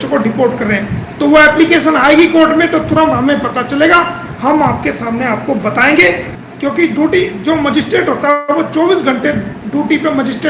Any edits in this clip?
yes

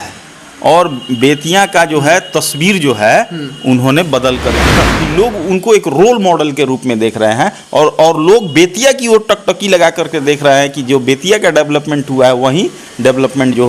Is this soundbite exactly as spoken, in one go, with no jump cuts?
no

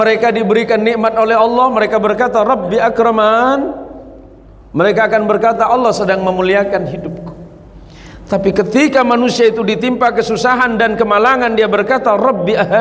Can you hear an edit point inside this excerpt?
no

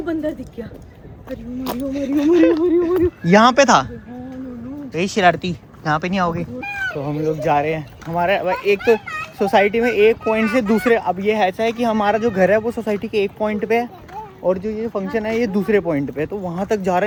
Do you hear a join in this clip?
no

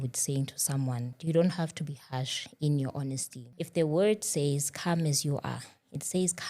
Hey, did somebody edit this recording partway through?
yes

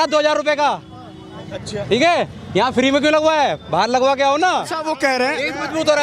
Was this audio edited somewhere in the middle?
yes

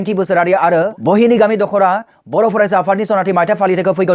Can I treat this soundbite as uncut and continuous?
no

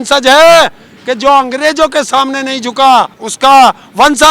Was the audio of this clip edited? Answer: yes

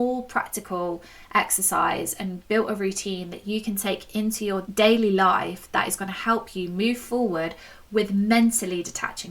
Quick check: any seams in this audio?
yes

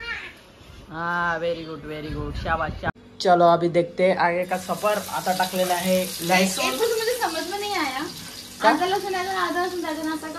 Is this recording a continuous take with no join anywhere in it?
no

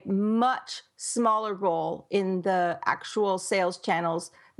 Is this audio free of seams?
yes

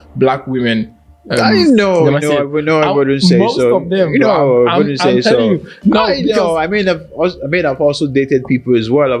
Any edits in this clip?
no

